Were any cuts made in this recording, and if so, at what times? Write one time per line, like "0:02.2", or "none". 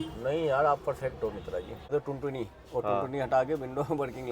0:01.9